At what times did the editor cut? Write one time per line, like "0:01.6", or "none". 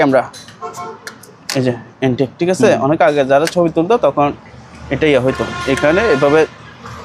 none